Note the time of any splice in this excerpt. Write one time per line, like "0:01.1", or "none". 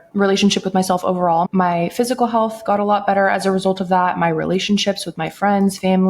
0:01.5